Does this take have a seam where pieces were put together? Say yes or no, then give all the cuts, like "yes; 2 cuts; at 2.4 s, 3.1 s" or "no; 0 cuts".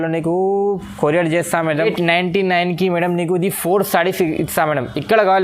yes; 1 cut; at 1.8 s